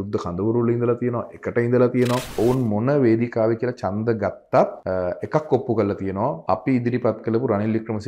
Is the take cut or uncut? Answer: cut